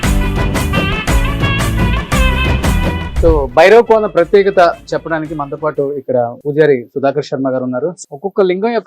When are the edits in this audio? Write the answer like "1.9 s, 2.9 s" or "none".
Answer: 3.1 s, 8.0 s